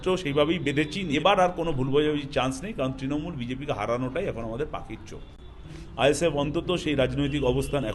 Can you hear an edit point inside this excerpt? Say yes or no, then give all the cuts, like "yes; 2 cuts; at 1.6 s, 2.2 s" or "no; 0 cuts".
yes; 2 cuts; at 1.1 s, 5.8 s